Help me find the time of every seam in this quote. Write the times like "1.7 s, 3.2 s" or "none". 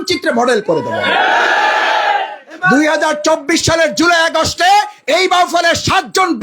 2.5 s